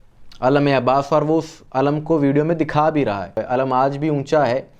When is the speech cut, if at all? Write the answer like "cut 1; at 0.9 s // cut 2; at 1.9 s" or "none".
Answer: cut 1; at 3.4 s